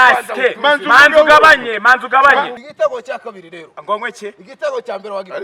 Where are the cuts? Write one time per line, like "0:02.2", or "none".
0:02.5